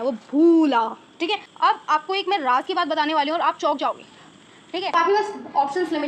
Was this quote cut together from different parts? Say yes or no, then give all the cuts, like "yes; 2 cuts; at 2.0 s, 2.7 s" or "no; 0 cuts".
yes; 2 cuts; at 1.5 s, 4.9 s